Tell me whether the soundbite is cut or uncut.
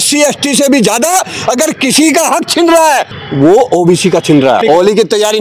cut